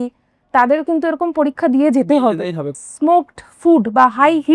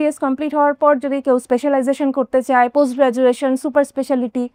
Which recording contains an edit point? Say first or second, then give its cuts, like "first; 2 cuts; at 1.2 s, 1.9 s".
first; 1 cut; at 2.8 s